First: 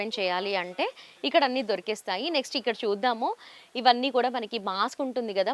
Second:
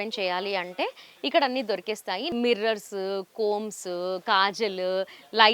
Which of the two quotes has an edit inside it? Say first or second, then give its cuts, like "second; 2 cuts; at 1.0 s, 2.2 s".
second; 1 cut; at 2.3 s